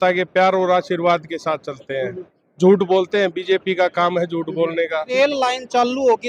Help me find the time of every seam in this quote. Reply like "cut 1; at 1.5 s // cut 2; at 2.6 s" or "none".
cut 1; at 5.1 s